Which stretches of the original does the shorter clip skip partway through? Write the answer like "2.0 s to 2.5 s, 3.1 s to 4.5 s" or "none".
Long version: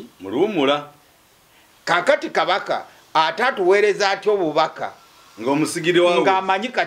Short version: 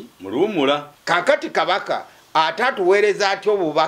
0.9 s to 1.7 s